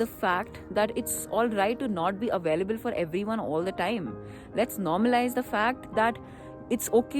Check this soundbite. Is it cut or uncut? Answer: uncut